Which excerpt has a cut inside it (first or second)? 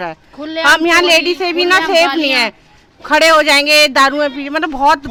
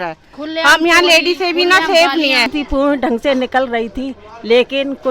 second